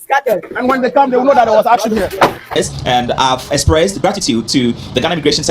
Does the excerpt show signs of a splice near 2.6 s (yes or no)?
yes